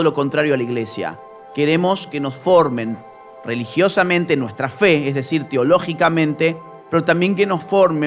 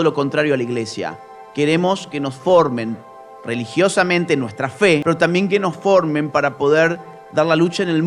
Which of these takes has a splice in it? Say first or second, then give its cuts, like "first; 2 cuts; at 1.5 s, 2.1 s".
second; 1 cut; at 5.0 s